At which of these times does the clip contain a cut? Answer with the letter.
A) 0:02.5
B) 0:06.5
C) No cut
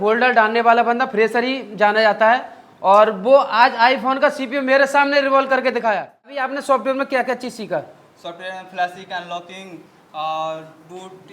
B